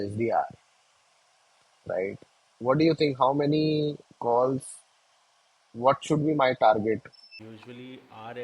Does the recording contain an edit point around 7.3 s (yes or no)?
yes